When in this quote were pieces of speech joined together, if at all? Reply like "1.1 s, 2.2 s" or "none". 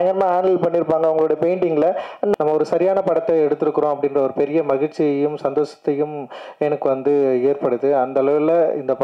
2.4 s